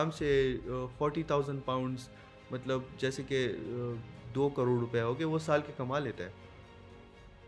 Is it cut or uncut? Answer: uncut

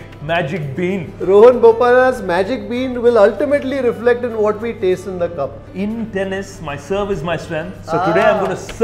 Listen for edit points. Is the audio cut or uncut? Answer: cut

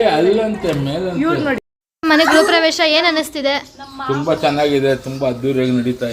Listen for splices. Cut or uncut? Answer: cut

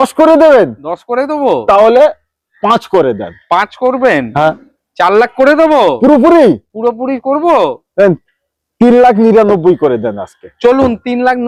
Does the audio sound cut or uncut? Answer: uncut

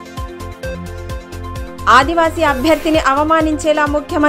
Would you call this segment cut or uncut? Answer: uncut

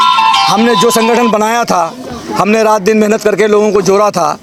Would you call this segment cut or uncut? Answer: uncut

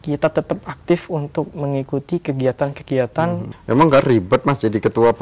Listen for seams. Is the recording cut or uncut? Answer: cut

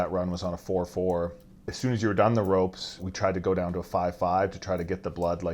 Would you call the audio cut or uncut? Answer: cut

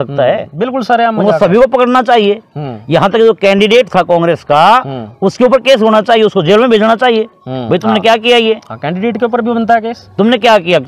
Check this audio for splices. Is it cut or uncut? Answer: uncut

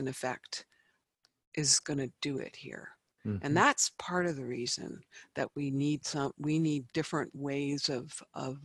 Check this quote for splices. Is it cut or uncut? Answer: uncut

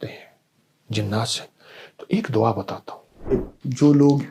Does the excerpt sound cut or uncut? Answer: cut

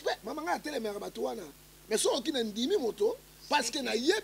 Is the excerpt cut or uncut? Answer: uncut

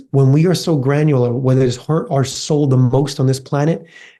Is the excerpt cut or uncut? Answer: uncut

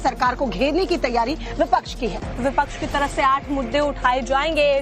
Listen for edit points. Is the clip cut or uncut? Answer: cut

